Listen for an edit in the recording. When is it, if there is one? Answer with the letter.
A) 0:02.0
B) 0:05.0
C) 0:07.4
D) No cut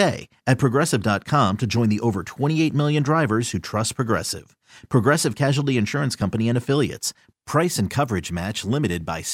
D